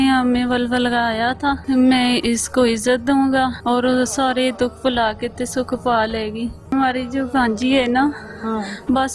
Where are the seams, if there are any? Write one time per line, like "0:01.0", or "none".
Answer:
0:01.6
0:03.6
0:06.7